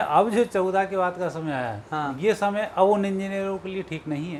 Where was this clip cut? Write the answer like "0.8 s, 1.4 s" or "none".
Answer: none